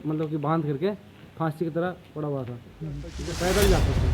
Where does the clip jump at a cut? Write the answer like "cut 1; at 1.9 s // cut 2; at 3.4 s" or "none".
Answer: cut 1; at 3.1 s